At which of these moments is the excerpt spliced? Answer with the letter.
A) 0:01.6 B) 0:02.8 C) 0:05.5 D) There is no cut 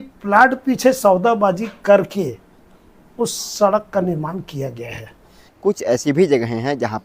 C